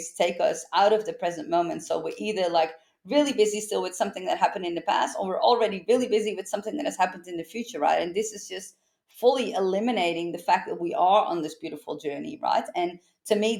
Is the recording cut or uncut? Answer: uncut